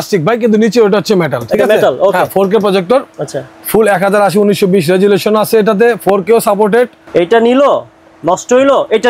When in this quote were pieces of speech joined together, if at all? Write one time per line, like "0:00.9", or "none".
0:07.0